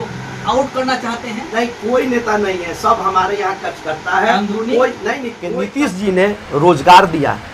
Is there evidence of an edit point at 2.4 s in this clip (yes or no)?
no